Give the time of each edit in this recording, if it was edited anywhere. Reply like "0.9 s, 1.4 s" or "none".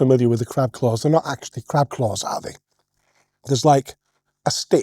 none